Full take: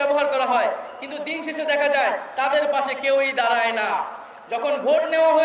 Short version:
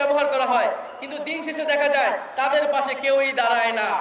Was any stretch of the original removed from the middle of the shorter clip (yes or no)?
no